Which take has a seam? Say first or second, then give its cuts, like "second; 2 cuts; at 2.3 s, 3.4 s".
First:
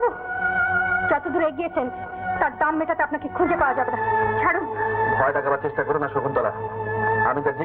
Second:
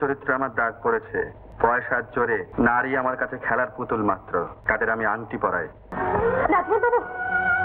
second; 4 cuts; at 1.4 s, 2.5 s, 4.6 s, 5.9 s